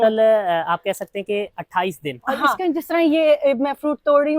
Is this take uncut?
no; 1 cut; at 2.4 s

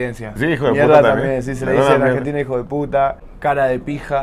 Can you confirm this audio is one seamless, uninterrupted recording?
no; 1 cut; at 3.3 s

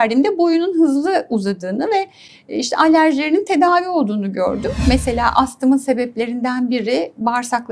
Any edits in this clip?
yes; 1 cut; at 4.8 s

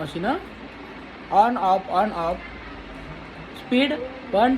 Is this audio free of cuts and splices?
yes; 0 cuts

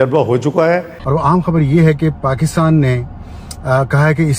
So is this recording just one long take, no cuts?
no; 1 cut; at 0.9 s

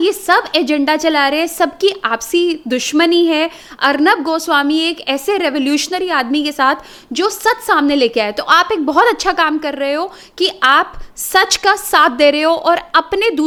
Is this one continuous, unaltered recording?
yes; 0 cuts

